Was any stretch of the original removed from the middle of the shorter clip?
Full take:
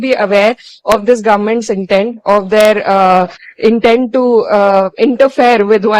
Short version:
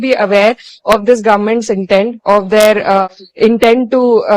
yes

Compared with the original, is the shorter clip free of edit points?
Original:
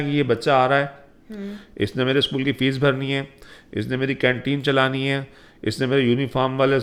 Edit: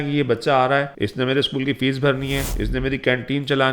no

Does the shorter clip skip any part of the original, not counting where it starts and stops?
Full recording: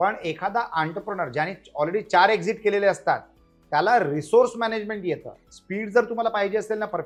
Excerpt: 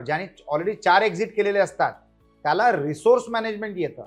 no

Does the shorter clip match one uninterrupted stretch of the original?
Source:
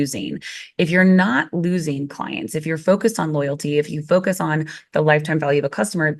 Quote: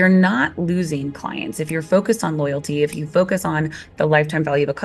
yes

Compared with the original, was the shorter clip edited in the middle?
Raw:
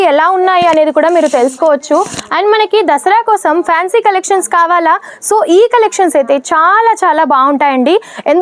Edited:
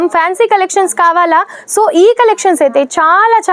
no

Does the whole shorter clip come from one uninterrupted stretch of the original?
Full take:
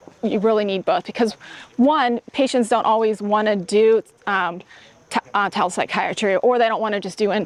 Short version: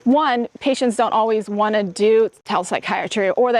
no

